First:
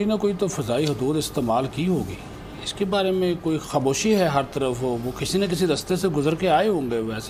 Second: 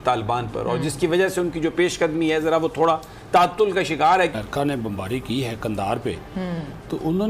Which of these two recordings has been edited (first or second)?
second